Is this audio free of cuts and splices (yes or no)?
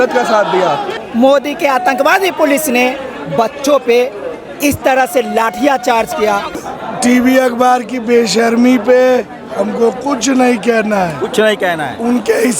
no